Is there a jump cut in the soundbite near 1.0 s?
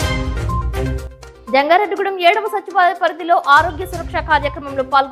yes; 1 cut; at 1.0 s

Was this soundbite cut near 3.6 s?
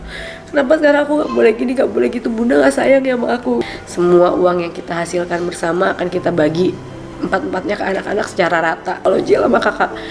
yes; 2 cuts; at 3.6 s, 9.0 s

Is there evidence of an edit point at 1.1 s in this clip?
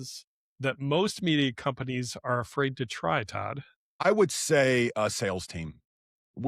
no; 1 cut; at 4.1 s

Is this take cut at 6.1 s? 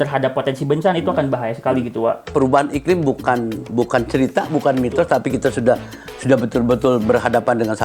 no; 1 cut; at 2.3 s

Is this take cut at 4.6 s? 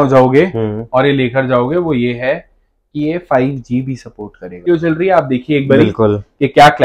yes; 1 cut; at 4.6 s

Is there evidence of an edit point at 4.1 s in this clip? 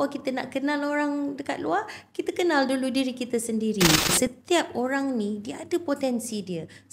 yes; 1 cut; at 4.1 s

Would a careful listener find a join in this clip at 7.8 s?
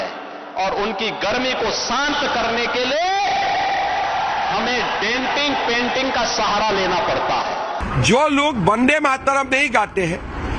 yes; 1 cut; at 7.8 s

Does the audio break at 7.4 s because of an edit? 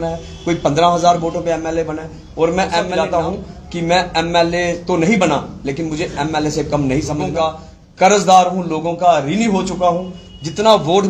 yes; 2 cuts; at 2.9 s, 7.4 s

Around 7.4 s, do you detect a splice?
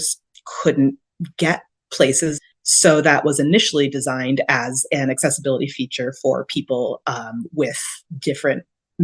no; 1 cut; at 2.4 s

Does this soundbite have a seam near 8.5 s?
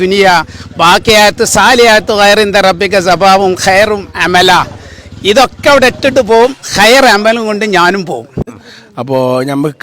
yes; 1 cut; at 8.5 s

